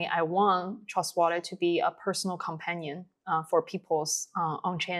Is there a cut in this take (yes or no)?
no